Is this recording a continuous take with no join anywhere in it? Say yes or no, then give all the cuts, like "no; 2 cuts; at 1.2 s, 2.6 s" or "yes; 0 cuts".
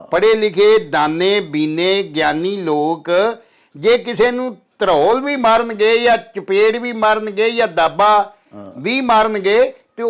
yes; 0 cuts